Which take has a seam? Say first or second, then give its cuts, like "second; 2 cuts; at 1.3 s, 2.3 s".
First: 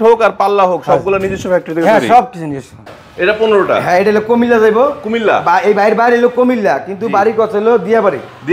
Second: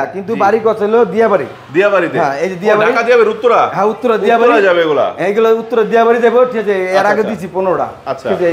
first; 1 cut; at 2.8 s